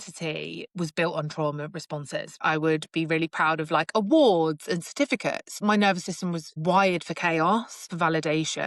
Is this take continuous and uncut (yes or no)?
no